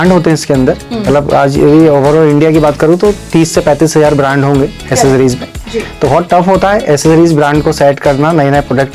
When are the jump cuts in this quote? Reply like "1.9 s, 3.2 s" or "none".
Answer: none

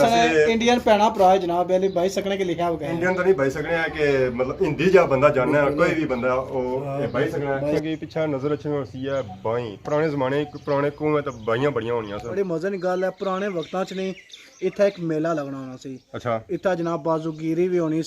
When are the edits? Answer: 7.8 s, 12.3 s

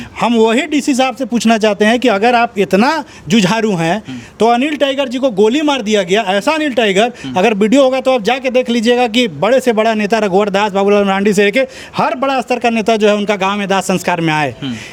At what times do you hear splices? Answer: none

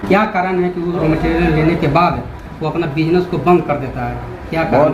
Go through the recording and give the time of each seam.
1.0 s

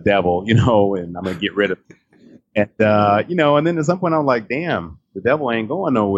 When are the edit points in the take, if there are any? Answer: none

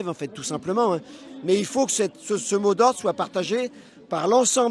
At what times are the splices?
none

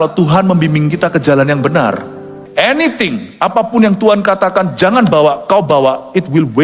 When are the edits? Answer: 2.3 s

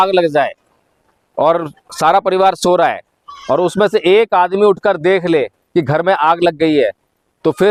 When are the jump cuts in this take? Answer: none

